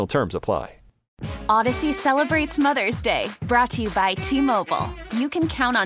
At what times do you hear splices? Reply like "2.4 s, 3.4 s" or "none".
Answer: 1.2 s